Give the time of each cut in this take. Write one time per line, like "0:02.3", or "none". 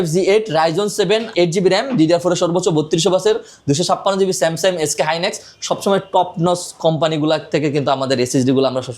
0:01.3